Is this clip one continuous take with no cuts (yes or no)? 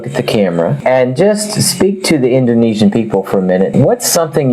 yes